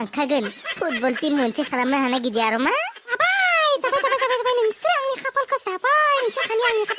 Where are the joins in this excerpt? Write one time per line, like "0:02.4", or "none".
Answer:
0:03.0